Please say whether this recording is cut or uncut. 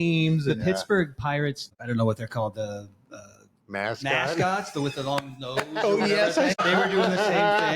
cut